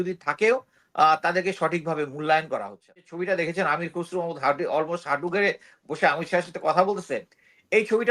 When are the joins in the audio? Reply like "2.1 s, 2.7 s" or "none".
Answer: 3.1 s